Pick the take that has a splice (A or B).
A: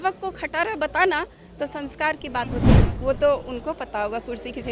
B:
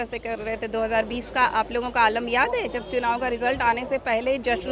A